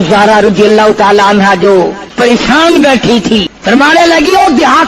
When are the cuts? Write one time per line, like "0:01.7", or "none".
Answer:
0:02.0
0:03.5